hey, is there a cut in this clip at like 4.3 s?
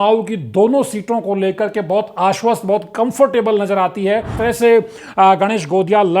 yes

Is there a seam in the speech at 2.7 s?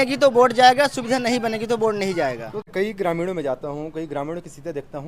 yes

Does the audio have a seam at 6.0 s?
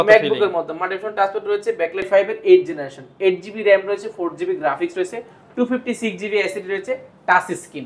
no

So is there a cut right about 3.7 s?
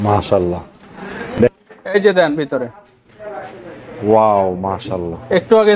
no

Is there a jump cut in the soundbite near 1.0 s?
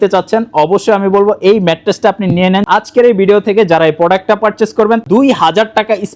no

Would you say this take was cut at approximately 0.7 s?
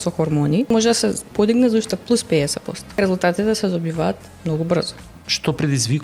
yes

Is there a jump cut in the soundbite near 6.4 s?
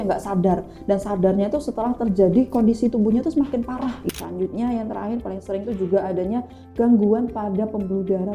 no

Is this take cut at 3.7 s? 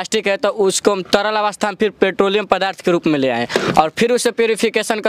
no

